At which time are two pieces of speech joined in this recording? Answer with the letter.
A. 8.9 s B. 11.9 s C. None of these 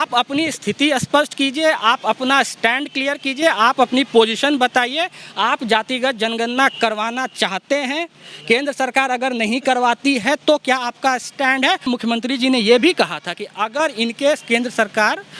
B